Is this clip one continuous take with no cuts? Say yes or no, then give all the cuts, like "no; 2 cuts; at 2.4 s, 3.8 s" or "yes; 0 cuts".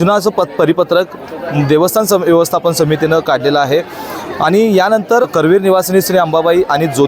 yes; 0 cuts